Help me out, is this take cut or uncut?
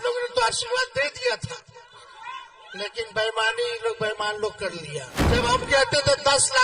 cut